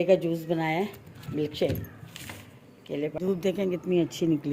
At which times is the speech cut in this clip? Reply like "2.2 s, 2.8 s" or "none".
3.1 s

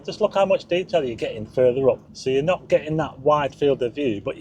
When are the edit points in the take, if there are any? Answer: 2.1 s

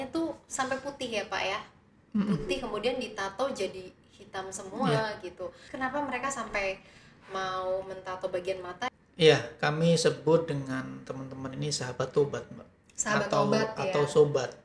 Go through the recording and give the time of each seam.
5.7 s, 8.9 s

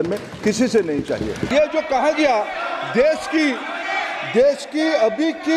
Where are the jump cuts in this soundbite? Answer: 1.4 s

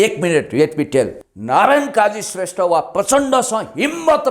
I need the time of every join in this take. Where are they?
1.1 s

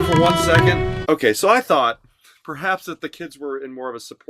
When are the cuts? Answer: 0.9 s

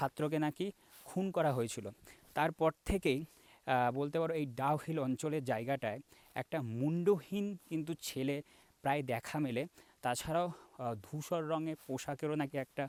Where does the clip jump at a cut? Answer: none

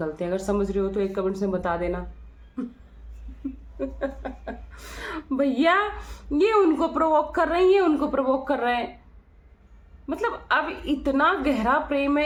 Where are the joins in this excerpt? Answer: none

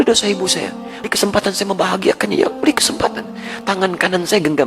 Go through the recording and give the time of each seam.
1.1 s

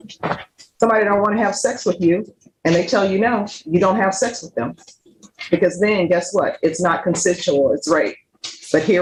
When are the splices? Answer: none

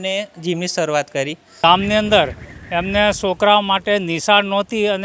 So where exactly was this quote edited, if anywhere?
1.5 s

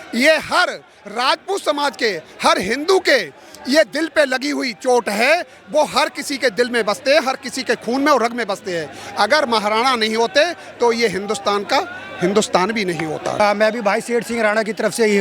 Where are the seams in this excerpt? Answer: 13.4 s

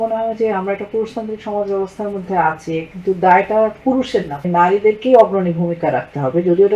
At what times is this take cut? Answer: 4.5 s

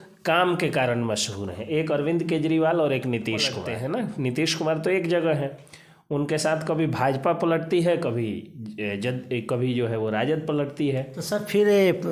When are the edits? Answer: 3.4 s

